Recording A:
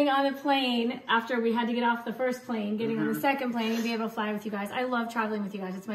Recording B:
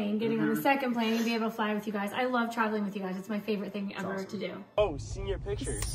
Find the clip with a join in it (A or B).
B